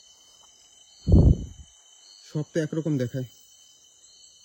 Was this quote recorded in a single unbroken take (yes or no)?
yes